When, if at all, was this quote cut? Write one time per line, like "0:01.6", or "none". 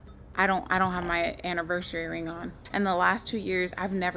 0:02.6